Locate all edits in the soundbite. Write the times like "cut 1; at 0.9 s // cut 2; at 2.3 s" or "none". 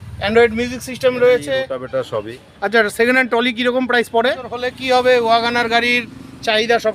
cut 1; at 1.7 s // cut 2; at 4.7 s